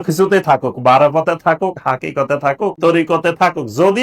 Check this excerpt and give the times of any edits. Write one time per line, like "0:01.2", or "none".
0:02.8

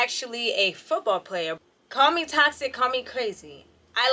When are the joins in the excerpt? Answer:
0:01.6

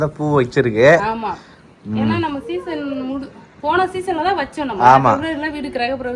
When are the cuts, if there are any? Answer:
none

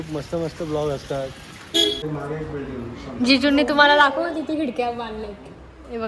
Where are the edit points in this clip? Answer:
0:02.0

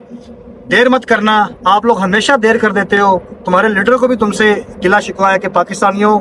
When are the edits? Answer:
none

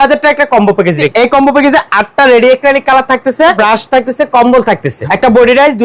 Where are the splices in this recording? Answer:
0:01.1
0:03.6
0:04.9

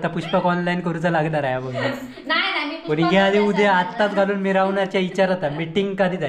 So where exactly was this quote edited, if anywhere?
none

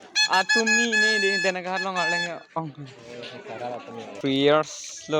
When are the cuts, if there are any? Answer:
0:04.2

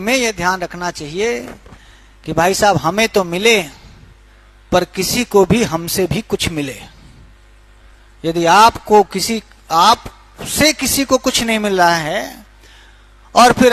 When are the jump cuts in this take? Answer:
none

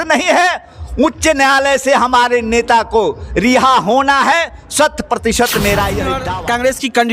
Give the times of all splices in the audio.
0:06.2

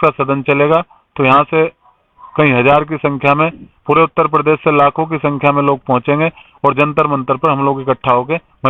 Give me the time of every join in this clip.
none

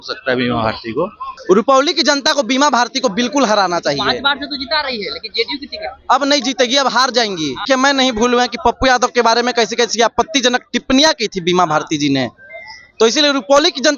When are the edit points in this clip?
0:01.3
0:07.6

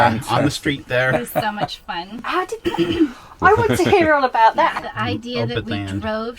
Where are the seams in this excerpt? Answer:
0:04.8

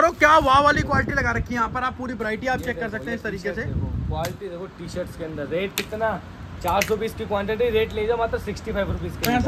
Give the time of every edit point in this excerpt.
none

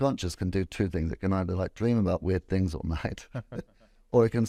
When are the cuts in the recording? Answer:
none

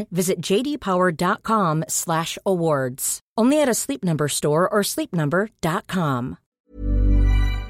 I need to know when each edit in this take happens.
0:06.6

